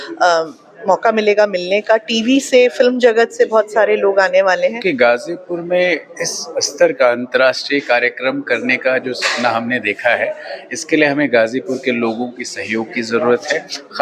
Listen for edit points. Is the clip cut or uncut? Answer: cut